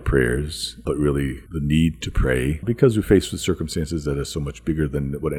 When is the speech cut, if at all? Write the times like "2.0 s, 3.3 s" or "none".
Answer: 0.8 s, 1.4 s, 2.6 s